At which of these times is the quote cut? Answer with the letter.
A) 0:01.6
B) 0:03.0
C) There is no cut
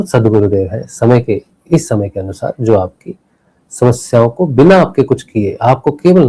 C